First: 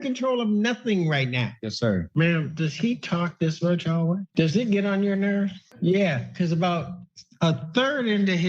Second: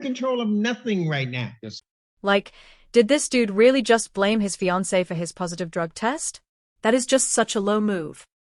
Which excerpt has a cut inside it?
first; 2 cuts; at 2.0 s, 4.3 s

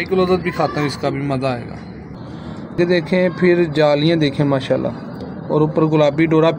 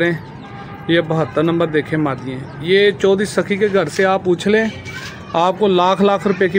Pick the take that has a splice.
first; 1 cut; at 2.8 s

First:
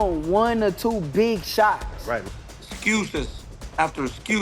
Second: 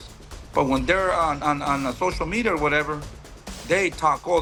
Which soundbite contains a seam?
first; 1 cut; at 2.2 s

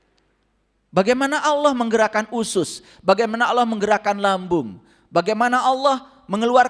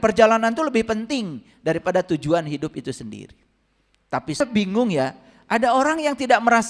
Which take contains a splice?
second; 1 cut; at 4.4 s

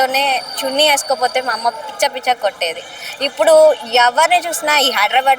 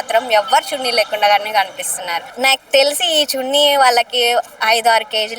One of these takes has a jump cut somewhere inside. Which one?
second; 1 cut; at 2.2 s

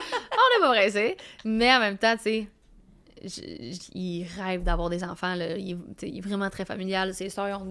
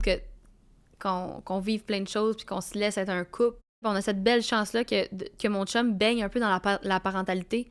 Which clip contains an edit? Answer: second; 1 cut; at 3.8 s

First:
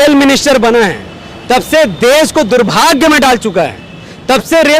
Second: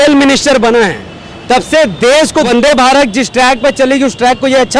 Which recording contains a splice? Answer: second; 1 cut; at 2.5 s

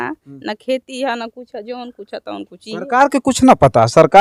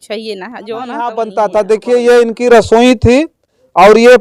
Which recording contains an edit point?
second; 1 cut; at 1.2 s

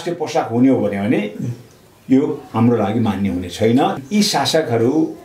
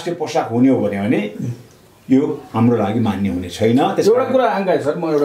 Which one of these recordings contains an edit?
first; 1 cut; at 3.9 s

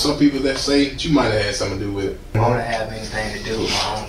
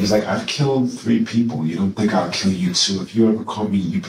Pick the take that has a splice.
first; 2 cuts; at 1.0 s, 2.4 s

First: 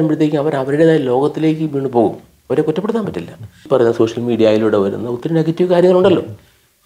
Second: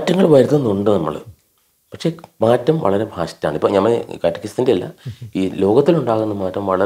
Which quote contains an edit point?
first; 1 cut; at 3.6 s

